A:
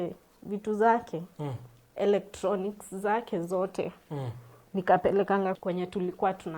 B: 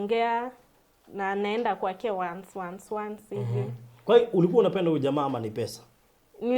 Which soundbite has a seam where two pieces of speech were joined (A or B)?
A